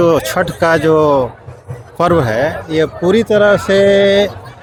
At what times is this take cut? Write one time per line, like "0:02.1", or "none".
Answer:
none

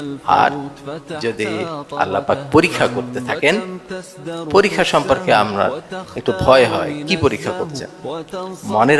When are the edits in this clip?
none

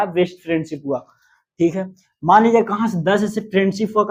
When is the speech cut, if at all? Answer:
none

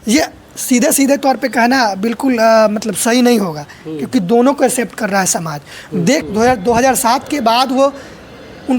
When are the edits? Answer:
0:06.2

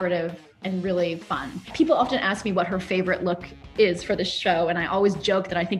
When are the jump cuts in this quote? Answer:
0:01.6

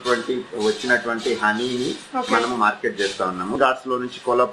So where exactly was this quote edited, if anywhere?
0:03.6

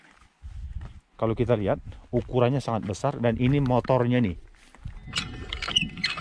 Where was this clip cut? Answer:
0:04.9

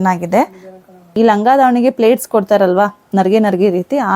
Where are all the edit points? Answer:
0:01.0

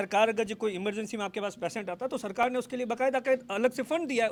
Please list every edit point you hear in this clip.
none

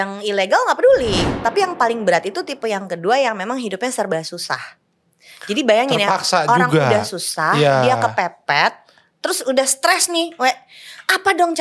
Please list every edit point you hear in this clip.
0:01.3

